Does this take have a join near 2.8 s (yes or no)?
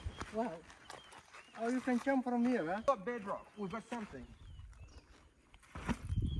yes